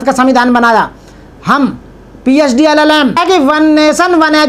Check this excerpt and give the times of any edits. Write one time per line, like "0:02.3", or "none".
0:03.2

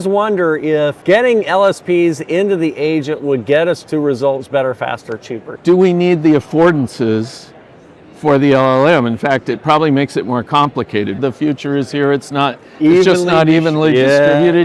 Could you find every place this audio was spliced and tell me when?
0:01.0
0:05.4
0:11.2

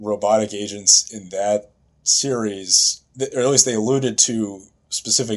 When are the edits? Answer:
0:03.0

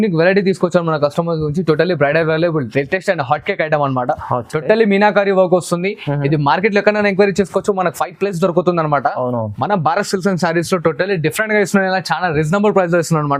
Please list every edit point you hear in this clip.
none

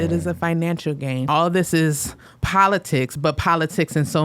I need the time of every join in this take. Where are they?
0:01.3

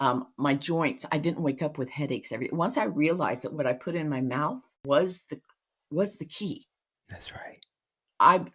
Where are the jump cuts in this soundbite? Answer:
0:04.7

